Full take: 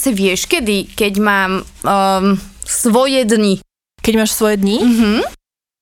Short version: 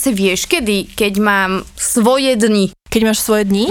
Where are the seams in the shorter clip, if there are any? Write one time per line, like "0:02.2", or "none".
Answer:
0:01.7
0:02.8